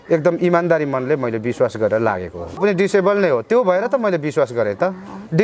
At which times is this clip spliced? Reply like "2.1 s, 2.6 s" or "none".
2.6 s